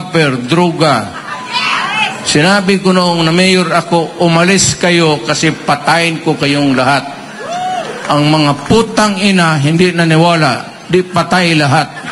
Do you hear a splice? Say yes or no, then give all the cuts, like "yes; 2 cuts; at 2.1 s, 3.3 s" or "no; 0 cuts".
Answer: no; 0 cuts